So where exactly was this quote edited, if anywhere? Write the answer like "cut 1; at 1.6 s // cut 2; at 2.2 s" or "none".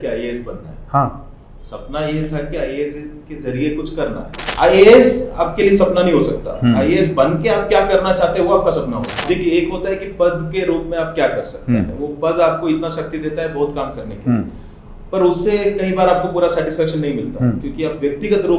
cut 1; at 4.4 s // cut 2; at 9.2 s